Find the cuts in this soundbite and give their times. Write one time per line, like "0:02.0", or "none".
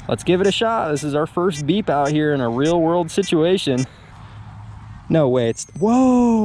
0:04.0